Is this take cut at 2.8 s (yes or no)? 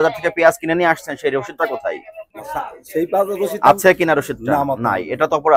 no